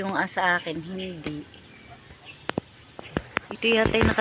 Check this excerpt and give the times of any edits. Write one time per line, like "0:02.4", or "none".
none